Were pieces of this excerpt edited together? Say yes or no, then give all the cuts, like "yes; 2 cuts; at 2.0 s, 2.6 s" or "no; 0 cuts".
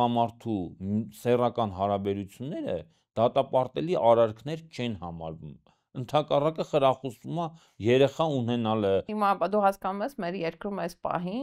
yes; 1 cut; at 9.1 s